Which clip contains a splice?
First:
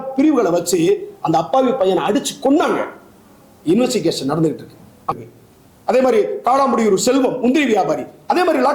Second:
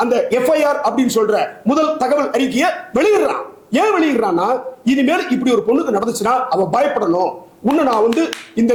first; 1 cut; at 5.1 s

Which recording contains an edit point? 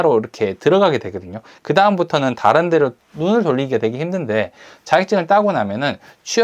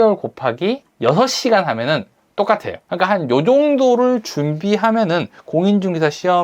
second; 2 cuts; at 0.9 s, 2.8 s

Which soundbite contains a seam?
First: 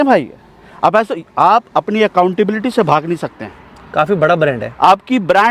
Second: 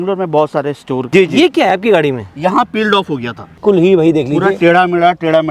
second; 2 cuts; at 1.2 s, 3.6 s

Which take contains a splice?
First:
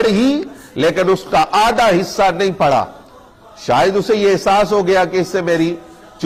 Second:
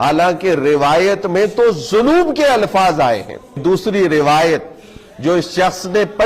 second; 1 cut; at 3.6 s

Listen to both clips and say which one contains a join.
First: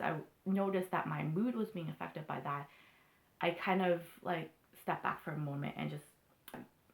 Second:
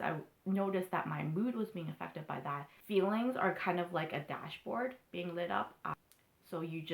second; 2 cuts; at 2.7 s, 5.9 s

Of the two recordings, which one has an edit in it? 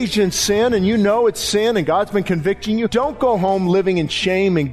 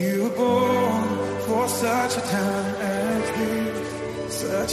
first; 1 cut; at 2.9 s

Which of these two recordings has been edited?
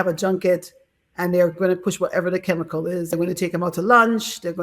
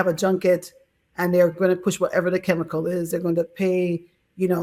first; 1 cut; at 3.1 s

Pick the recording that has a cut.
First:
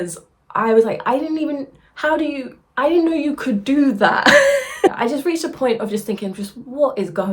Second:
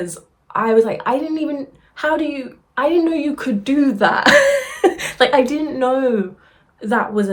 first; 1 cut; at 4.9 s

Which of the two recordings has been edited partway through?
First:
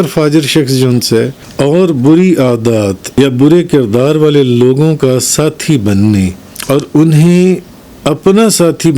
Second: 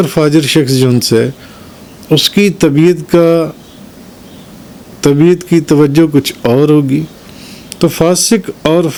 first; 3 cuts; at 1.4 s, 3.0 s, 6.5 s

